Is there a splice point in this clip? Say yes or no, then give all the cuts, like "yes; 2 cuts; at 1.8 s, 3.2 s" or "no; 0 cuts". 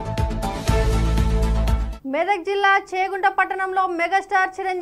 yes; 1 cut; at 1.9 s